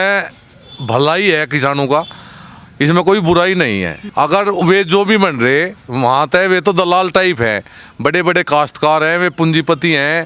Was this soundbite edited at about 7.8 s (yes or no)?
no